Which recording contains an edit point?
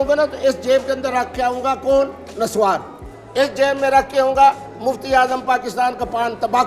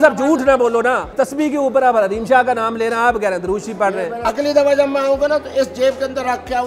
second; 2 cuts; at 1.1 s, 4.1 s

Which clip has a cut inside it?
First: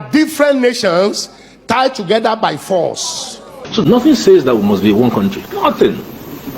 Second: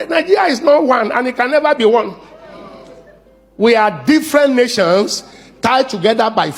first; 1 cut; at 3.6 s

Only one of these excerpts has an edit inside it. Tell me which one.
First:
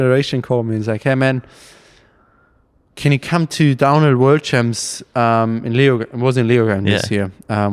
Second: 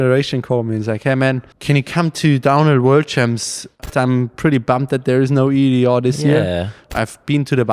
second; 3 cuts; at 1.5 s, 3.8 s, 6.9 s

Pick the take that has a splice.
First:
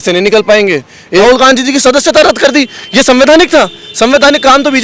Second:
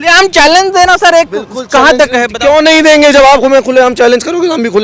first; 1 cut; at 1.2 s

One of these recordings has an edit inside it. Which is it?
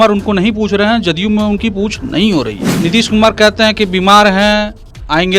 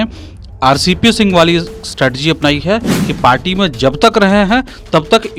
first; 1 cut; at 2.6 s

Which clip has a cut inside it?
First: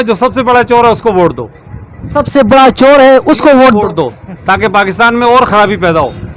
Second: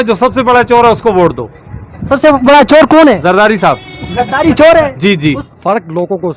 second; 2 cuts; at 1.9 s, 5.5 s

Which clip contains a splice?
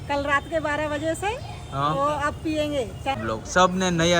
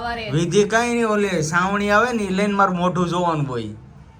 first; 1 cut; at 3.2 s

